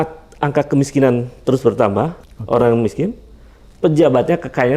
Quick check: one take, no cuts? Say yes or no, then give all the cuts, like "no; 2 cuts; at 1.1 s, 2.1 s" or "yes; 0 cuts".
no; 1 cut; at 2.3 s